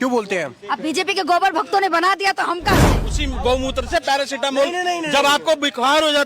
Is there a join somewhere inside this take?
yes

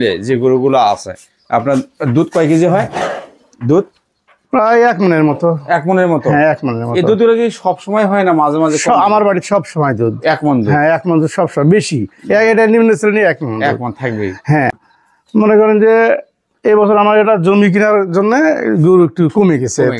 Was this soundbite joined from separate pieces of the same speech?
yes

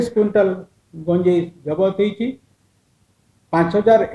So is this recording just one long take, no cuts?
yes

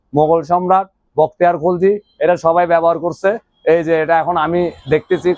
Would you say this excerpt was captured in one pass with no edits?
yes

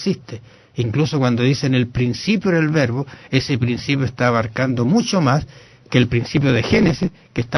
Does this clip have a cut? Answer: yes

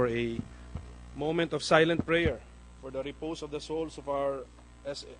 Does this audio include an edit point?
no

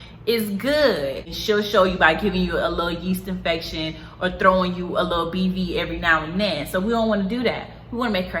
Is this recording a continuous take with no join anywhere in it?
no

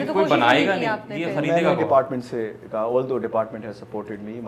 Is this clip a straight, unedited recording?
yes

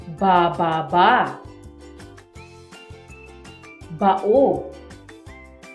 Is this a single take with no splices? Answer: no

